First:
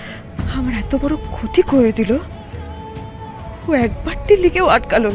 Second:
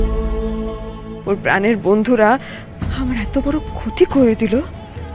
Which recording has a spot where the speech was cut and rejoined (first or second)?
second